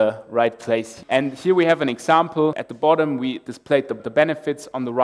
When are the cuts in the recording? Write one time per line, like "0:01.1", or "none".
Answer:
0:00.9
0:02.7
0:04.0